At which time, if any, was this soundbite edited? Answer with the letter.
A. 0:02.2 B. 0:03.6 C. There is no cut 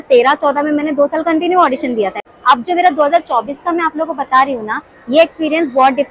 A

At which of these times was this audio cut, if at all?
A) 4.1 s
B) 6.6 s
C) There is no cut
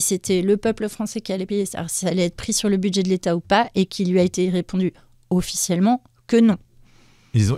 C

